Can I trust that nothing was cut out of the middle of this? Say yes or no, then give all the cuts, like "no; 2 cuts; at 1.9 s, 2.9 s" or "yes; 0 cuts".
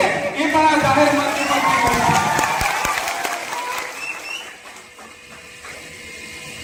yes; 0 cuts